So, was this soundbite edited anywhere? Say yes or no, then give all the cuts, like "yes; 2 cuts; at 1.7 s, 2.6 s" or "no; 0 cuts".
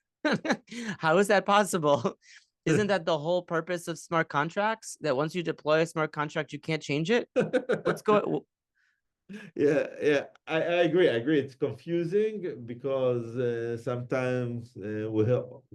no; 0 cuts